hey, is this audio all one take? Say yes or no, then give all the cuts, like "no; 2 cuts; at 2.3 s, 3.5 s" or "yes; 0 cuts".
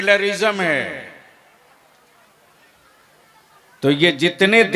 yes; 0 cuts